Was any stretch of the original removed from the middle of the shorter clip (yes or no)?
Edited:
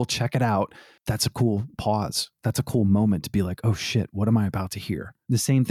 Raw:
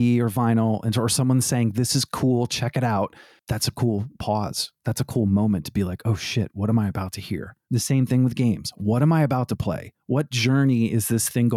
no